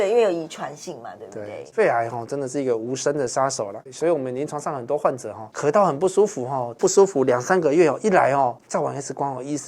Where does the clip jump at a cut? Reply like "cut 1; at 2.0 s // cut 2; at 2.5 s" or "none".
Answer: cut 1; at 1.7 s // cut 2; at 3.8 s